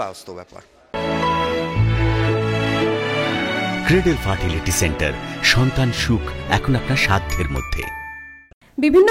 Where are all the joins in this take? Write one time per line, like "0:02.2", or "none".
none